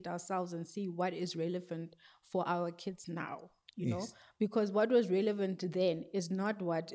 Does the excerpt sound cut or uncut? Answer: uncut